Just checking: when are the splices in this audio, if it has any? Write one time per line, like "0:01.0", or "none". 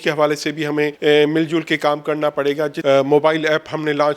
0:00.9
0:02.8